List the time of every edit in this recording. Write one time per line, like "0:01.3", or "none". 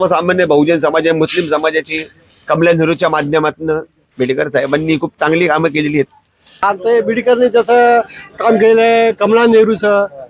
0:06.6